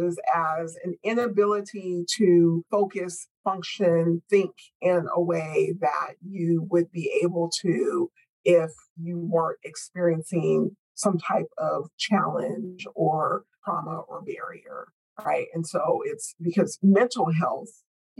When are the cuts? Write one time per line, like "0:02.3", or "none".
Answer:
0:01.0